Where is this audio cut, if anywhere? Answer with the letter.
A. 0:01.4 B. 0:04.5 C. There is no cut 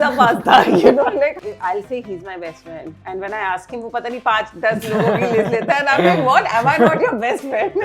A